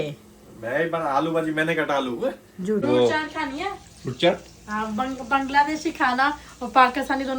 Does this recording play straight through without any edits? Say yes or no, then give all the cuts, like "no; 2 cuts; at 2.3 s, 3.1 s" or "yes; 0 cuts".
no; 1 cut; at 2.8 s